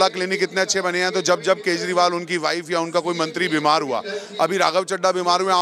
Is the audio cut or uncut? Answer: uncut